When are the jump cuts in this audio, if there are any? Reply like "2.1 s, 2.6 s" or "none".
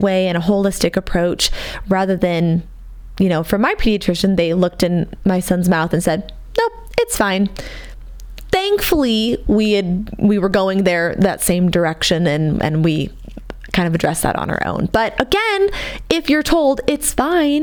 none